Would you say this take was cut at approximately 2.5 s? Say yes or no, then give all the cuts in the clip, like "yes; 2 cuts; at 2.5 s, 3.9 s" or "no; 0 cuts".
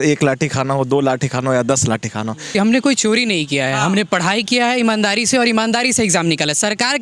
yes; 1 cut; at 2.5 s